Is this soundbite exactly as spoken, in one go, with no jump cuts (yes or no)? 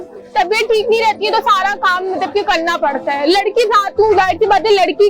yes